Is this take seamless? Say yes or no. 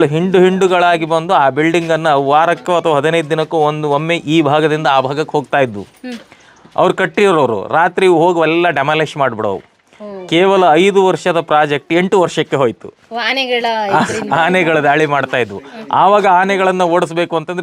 yes